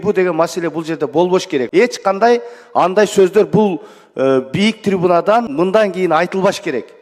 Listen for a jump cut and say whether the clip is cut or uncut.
cut